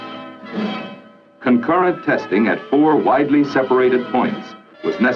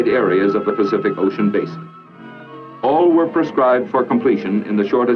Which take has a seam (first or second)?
first